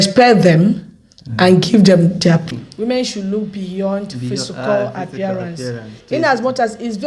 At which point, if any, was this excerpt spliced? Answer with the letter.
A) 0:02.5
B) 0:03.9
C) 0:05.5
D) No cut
A